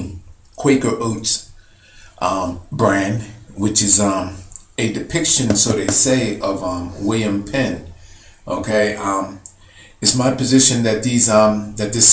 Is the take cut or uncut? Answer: uncut